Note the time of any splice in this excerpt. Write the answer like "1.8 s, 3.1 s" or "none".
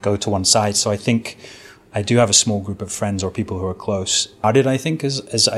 4.4 s